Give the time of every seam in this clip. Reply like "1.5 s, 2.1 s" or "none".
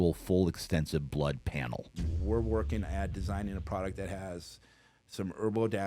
2.1 s